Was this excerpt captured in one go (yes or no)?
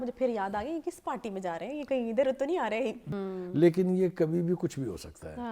no